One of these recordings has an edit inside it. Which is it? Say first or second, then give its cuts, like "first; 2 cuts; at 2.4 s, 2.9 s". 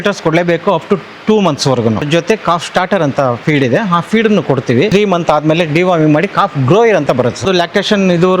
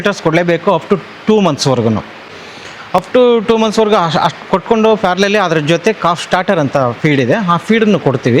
first; 3 cuts; at 2.1 s, 4.9 s, 7.4 s